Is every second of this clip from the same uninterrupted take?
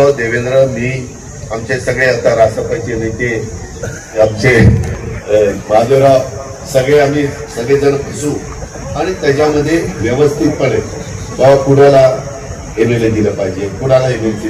yes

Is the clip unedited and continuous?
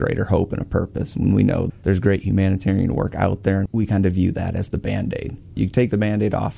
no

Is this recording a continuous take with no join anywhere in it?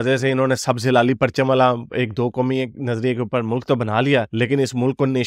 yes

